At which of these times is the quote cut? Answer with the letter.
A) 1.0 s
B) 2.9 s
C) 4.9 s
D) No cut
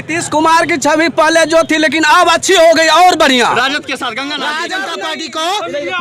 C